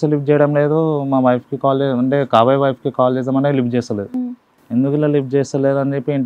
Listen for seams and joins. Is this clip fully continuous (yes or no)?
yes